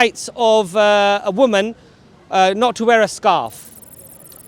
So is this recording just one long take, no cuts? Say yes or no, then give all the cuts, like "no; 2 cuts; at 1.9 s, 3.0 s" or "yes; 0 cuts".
yes; 0 cuts